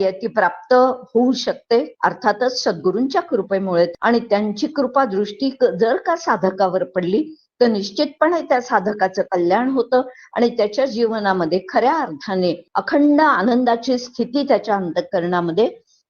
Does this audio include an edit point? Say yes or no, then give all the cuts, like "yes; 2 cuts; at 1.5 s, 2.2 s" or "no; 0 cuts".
yes; 3 cuts; at 1.9 s, 3.9 s, 12.7 s